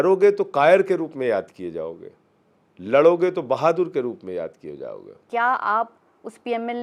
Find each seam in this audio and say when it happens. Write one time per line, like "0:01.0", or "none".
0:05.2

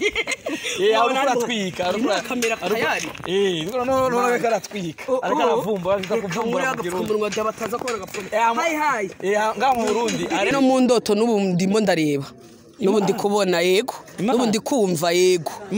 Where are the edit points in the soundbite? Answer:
0:10.5

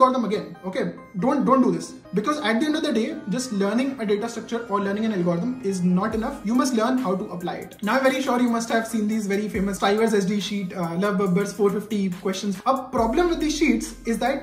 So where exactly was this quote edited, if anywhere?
0:07.7
0:09.8
0:12.6

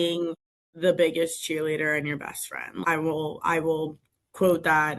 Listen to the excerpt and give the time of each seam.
0:02.9

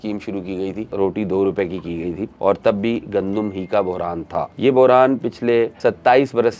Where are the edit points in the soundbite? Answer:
0:00.9
0:02.3
0:04.5
0:05.7

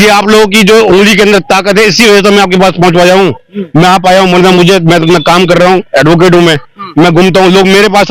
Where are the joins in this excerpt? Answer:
none

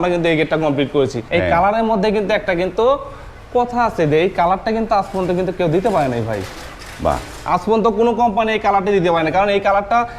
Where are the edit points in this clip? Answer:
0:01.2

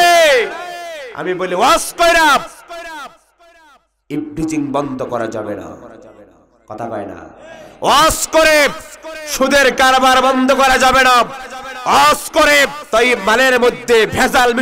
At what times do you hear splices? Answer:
0:12.8

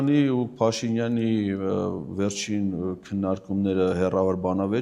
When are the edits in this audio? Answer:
none

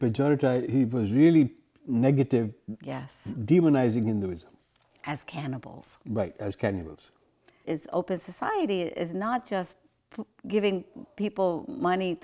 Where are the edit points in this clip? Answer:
0:07.6

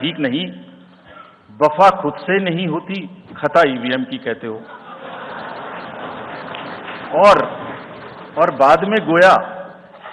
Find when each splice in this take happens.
none

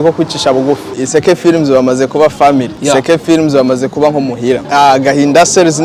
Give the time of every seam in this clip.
0:00.9
0:02.7
0:04.6

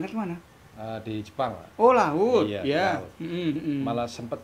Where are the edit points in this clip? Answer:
0:03.6

